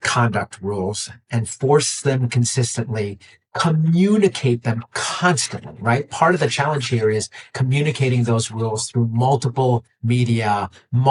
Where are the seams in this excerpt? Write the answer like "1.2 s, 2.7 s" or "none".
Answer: none